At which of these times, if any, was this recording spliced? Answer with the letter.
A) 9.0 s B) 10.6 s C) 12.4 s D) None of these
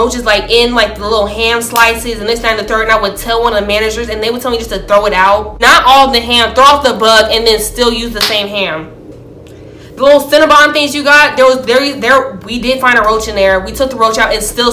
D